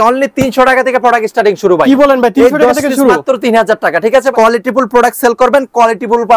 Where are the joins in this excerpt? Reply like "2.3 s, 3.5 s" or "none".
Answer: 4.3 s